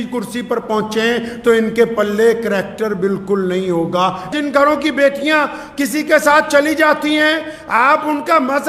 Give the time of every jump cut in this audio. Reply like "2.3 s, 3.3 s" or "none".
4.3 s